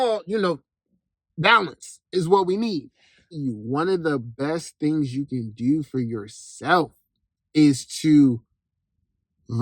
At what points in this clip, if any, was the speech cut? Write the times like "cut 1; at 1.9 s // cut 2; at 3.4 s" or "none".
cut 1; at 3.4 s